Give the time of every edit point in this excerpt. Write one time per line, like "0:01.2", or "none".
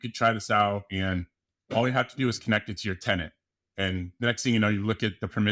none

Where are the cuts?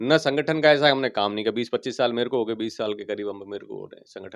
none

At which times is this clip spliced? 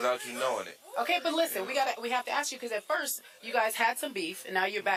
none

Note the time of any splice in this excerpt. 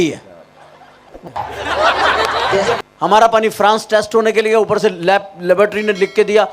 0:01.2
0:02.8

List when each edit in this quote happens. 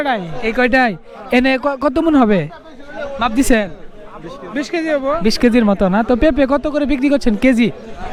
none

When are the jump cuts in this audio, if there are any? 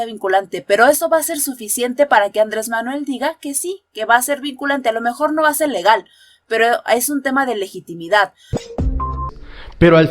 0:09.0

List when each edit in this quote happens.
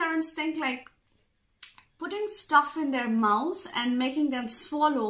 none

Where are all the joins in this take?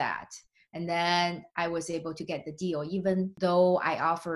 0:03.3

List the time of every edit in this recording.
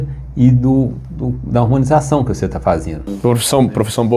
0:03.1

